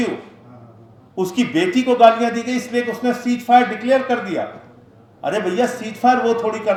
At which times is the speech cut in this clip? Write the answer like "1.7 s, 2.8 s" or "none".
none